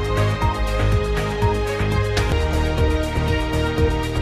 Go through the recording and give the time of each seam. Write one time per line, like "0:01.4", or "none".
none